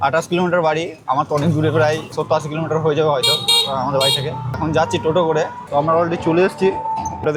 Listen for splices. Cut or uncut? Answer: uncut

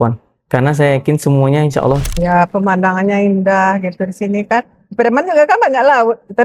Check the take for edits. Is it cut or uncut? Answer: cut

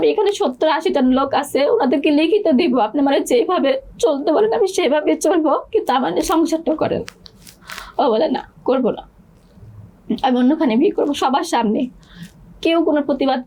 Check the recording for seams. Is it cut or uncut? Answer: uncut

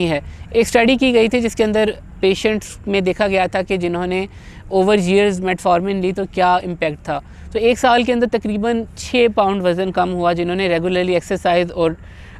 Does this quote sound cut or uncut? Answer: uncut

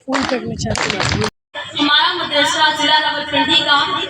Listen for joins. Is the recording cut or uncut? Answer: cut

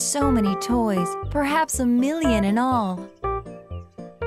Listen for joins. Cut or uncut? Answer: cut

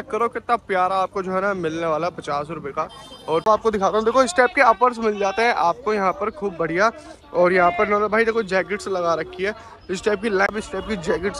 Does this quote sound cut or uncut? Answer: cut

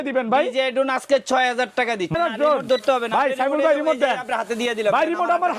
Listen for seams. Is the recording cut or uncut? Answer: cut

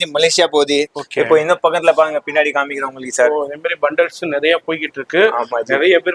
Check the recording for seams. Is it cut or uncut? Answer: uncut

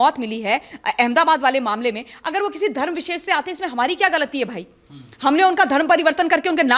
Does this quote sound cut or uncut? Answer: uncut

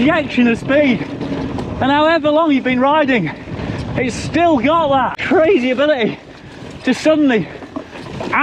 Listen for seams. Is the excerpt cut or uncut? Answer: cut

